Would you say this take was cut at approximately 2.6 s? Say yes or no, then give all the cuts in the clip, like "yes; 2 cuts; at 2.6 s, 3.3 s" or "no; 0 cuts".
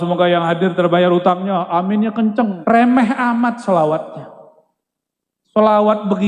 yes; 1 cut; at 2.6 s